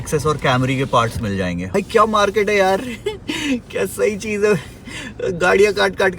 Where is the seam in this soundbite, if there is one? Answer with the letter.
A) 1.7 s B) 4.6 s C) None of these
A